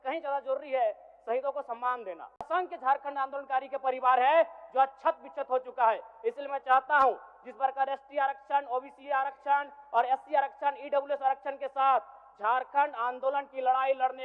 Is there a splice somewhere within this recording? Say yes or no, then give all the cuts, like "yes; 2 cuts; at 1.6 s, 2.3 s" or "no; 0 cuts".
yes; 1 cut; at 2.4 s